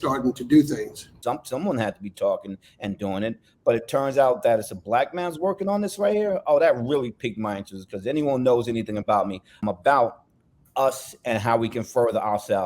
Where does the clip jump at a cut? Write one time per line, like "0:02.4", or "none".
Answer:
0:01.1
0:09.5